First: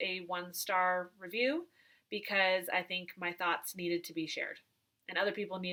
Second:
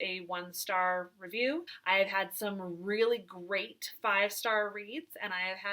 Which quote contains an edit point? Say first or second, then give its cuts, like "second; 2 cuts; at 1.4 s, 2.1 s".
second; 1 cut; at 1.7 s